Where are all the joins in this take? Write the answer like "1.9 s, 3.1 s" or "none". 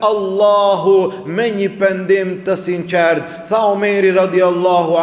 none